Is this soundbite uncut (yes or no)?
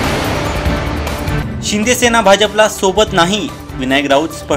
no